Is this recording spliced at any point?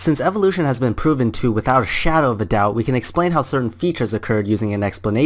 no; 0 cuts

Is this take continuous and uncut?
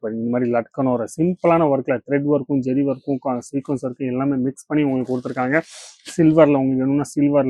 yes; 0 cuts

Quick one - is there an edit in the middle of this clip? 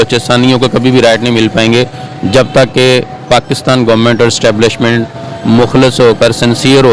no; 0 cuts

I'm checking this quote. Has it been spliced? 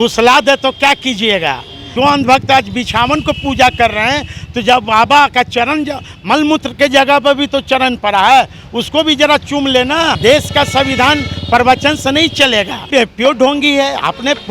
yes; 3 cuts; at 1.9 s, 10.2 s, 12.9 s

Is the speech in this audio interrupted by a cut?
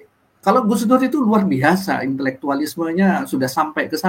no; 0 cuts

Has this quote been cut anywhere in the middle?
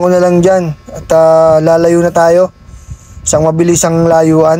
no; 0 cuts

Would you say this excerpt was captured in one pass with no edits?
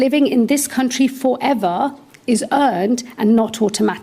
yes; 0 cuts

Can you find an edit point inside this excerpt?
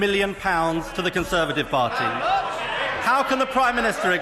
yes; 1 cut; at 2.7 s

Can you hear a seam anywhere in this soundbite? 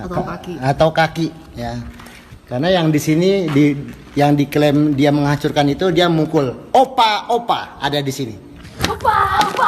yes; 1 cut; at 8.8 s

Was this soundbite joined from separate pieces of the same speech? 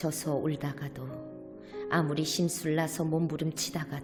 no; 0 cuts

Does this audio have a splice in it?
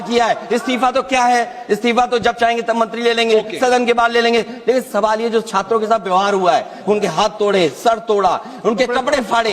no; 0 cuts

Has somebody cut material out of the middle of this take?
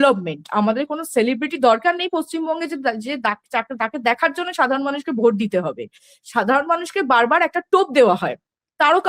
no; 0 cuts

